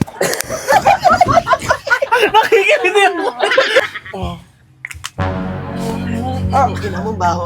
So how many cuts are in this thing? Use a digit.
1